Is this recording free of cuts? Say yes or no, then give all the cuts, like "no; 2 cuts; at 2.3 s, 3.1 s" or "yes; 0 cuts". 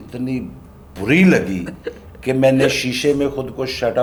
yes; 0 cuts